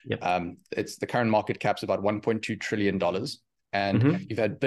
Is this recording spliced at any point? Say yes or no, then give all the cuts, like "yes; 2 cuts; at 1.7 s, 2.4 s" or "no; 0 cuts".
no; 0 cuts